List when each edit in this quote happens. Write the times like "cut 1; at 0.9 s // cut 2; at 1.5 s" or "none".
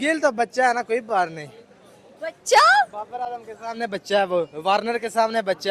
none